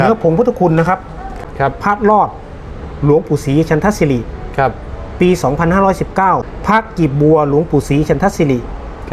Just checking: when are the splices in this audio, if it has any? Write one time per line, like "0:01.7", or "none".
0:01.4
0:06.5